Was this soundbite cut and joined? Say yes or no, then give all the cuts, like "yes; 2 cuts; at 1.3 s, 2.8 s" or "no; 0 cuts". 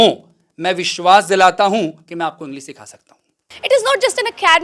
yes; 1 cut; at 3.5 s